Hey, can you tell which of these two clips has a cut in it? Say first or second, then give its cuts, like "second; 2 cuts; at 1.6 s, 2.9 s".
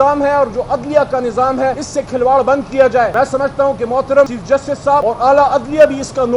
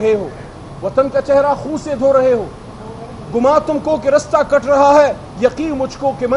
first; 3 cuts; at 1.8 s, 3.1 s, 4.8 s